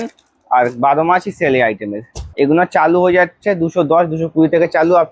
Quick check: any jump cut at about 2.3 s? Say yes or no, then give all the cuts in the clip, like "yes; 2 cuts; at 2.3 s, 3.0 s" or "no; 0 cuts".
yes; 1 cut; at 2.3 s